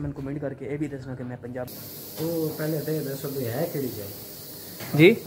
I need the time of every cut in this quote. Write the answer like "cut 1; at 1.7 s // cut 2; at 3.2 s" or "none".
cut 1; at 1.7 s